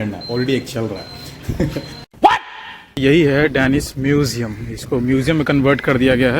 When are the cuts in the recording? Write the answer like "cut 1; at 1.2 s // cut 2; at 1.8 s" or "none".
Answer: cut 1; at 3.0 s